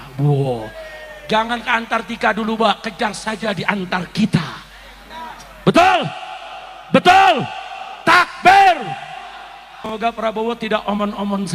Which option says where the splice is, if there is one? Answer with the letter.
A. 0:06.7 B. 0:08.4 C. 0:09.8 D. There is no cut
C